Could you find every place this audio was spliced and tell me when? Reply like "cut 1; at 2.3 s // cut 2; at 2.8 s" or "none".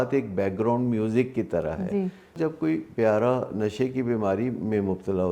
cut 1; at 2.4 s